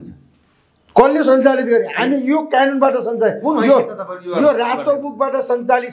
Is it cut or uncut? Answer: uncut